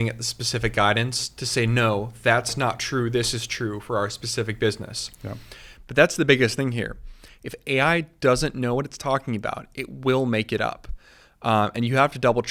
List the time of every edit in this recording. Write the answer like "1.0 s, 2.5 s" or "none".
none